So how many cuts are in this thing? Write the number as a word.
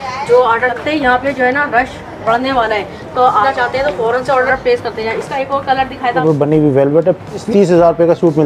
five